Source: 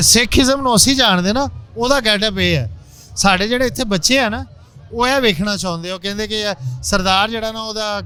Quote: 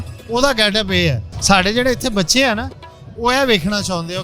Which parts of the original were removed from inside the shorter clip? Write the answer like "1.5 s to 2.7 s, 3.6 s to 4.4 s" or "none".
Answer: 2.8 s to 3.0 s